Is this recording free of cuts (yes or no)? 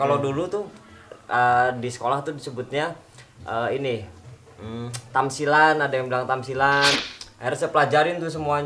no